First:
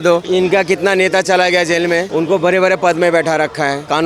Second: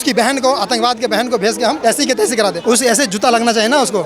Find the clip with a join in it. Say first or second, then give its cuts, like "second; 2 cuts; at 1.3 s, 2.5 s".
second; 2 cuts; at 1.8 s, 2.6 s